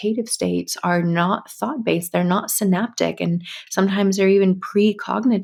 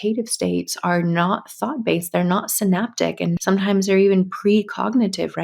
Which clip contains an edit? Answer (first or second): second